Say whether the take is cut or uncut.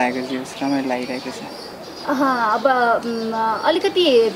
uncut